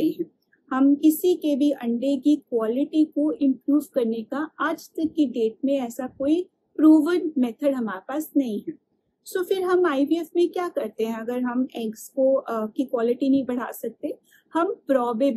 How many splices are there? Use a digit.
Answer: 0